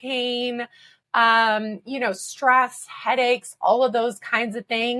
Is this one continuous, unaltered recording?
yes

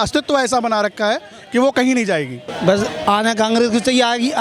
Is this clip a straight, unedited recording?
no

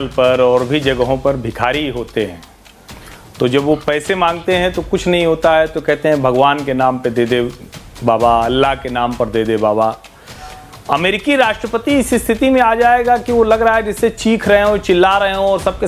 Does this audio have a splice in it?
no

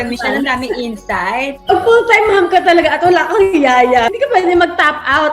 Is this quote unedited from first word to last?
no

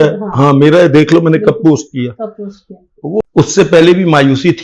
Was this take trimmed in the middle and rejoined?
yes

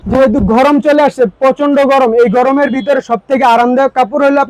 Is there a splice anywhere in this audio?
no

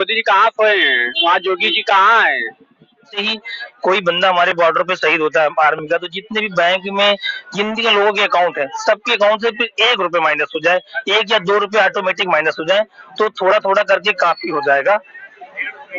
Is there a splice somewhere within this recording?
yes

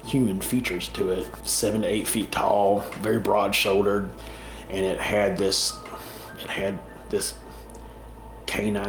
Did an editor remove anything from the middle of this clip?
yes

